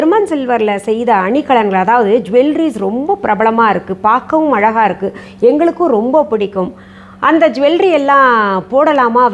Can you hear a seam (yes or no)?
no